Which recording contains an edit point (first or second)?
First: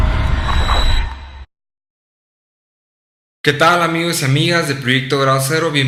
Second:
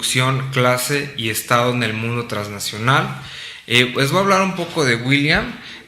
second